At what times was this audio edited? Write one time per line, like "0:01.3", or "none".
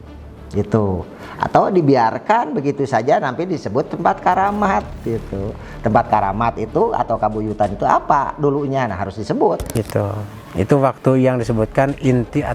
0:09.7